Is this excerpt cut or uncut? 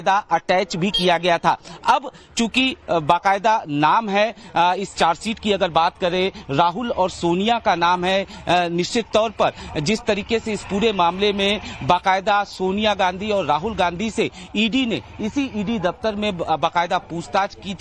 uncut